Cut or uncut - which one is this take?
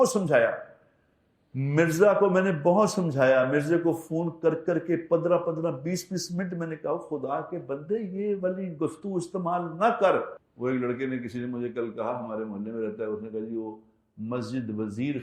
cut